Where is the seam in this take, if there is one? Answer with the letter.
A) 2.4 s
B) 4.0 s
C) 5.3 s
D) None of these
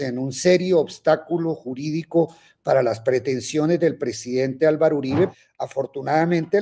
C